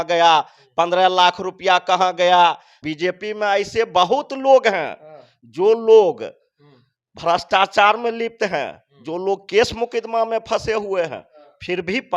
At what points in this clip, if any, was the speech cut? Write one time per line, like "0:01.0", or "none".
0:02.9